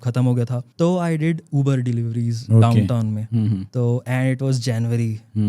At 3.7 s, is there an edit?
yes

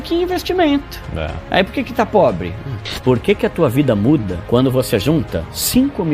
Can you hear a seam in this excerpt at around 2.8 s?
yes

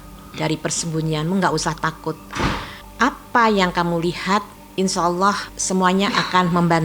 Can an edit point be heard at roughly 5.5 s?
yes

